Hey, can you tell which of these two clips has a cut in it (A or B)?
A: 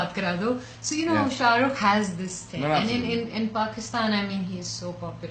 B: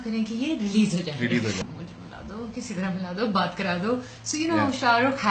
B